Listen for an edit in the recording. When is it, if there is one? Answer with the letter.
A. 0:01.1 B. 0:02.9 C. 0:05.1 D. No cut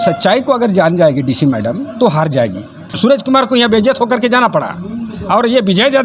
B